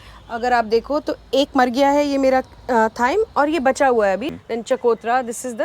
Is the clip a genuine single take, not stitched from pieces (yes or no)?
no